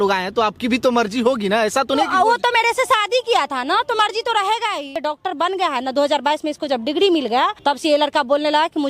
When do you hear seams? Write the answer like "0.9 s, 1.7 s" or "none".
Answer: 5.0 s, 7.6 s